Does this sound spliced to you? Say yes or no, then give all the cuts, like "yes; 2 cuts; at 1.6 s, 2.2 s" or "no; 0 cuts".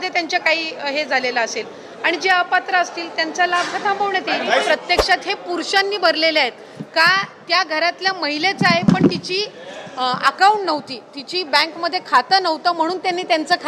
yes; 1 cut; at 4.6 s